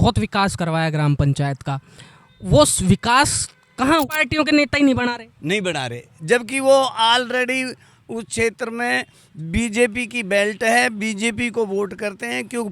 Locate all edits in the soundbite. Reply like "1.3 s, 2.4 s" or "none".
4.0 s